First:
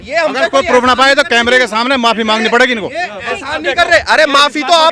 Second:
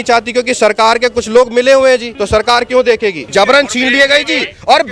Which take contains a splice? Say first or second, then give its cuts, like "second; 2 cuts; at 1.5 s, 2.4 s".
second; 2 cuts; at 2.1 s, 3.2 s